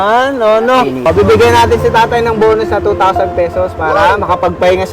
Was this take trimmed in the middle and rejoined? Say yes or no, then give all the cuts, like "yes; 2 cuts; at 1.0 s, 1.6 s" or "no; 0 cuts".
yes; 1 cut; at 1.1 s